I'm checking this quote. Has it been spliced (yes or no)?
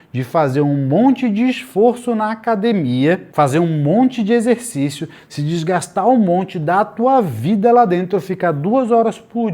yes